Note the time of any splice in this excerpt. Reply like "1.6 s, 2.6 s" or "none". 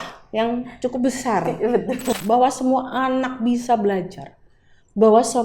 2.1 s